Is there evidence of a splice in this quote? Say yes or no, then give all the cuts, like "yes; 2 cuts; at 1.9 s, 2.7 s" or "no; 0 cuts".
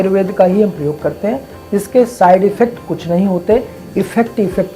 no; 0 cuts